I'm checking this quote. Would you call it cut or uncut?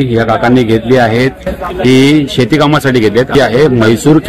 cut